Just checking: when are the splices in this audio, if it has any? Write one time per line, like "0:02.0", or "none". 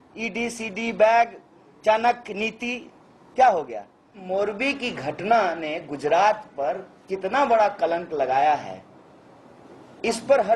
0:04.2